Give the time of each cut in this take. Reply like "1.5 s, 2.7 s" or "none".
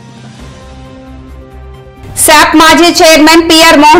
2.0 s